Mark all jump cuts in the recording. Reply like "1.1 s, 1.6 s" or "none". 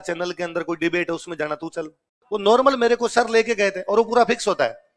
none